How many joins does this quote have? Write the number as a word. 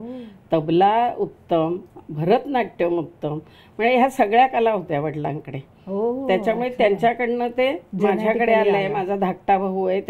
zero